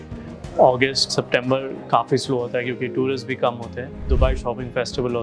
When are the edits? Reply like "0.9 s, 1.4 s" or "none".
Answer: 4.1 s